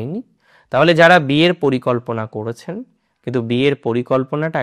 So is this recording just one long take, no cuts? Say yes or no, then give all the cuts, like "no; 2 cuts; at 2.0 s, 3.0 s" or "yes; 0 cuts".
yes; 0 cuts